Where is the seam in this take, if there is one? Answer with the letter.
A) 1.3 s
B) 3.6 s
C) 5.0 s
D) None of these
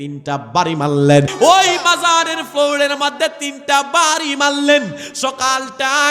A